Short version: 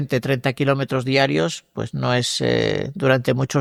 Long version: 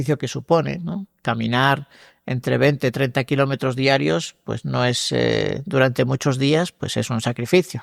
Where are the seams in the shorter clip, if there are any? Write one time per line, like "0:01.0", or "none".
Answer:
none